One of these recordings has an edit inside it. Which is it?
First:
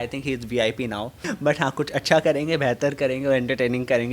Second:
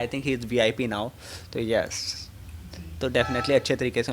first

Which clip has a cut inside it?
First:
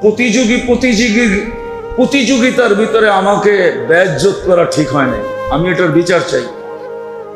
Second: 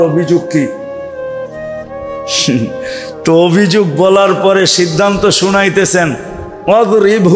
first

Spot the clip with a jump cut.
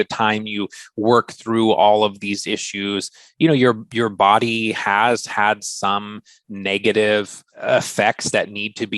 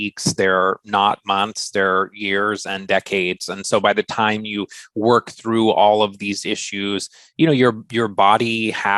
first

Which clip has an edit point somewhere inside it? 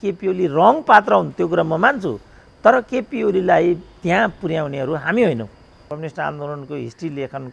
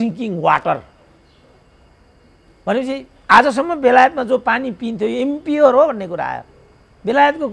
first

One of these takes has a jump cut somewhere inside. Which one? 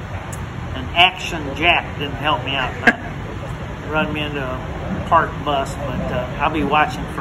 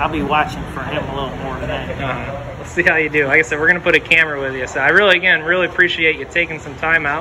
second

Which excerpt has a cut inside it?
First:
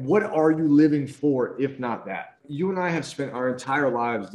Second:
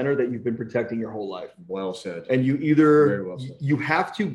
first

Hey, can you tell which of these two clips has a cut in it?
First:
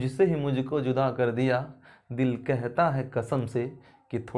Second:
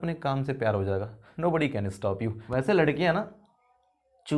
second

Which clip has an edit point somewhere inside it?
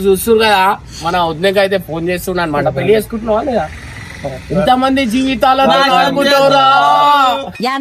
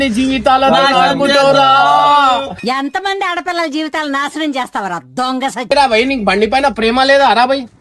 second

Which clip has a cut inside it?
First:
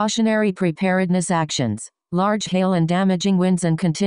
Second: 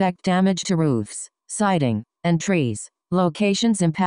first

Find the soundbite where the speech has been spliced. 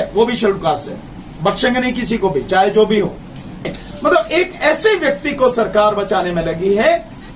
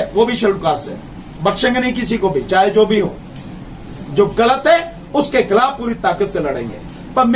first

